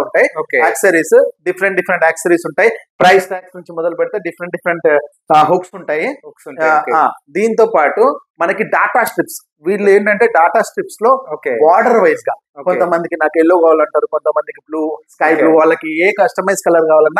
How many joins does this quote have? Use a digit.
0